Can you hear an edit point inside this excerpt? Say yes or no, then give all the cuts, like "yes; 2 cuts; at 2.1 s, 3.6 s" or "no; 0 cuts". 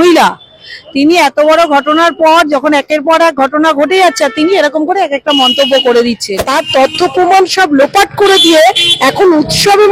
yes; 1 cut; at 6.4 s